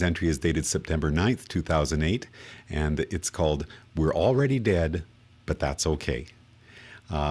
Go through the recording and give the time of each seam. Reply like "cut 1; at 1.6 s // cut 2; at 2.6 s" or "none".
cut 1; at 1.0 s